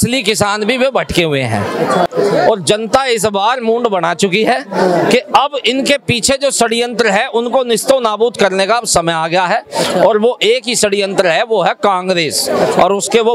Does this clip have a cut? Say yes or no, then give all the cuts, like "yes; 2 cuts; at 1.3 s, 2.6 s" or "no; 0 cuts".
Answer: yes; 1 cut; at 2.1 s